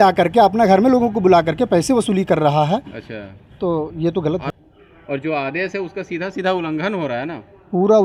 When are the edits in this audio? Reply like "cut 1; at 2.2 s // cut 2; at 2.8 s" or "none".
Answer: none